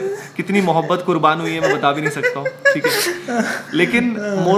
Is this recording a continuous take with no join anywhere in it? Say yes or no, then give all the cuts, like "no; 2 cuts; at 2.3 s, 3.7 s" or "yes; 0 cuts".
yes; 0 cuts